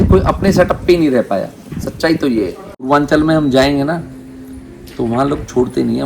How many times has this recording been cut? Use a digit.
1